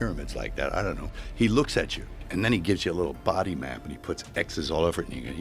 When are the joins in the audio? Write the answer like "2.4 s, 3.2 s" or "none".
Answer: 1.2 s, 2.3 s